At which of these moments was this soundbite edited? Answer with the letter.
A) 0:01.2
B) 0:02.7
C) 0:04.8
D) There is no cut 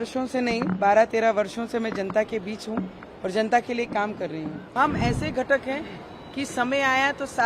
C